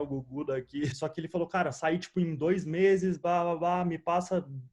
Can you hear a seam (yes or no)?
yes